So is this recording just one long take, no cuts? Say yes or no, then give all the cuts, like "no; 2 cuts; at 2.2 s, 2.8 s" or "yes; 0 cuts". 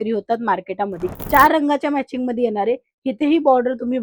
no; 1 cut; at 1.1 s